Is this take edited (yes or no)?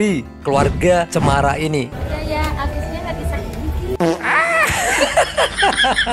yes